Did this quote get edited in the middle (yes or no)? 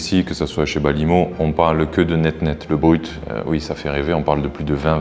no